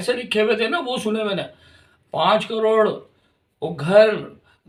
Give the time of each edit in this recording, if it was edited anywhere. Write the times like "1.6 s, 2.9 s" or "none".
none